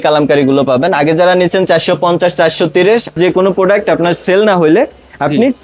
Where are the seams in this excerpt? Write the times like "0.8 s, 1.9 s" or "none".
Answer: 3.1 s